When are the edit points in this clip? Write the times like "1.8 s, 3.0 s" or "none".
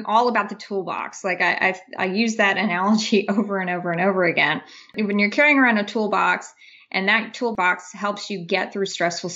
4.9 s, 7.5 s